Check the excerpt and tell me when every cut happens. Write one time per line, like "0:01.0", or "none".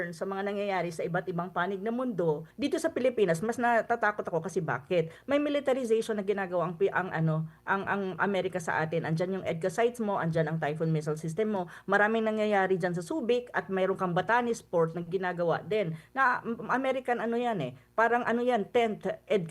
0:02.5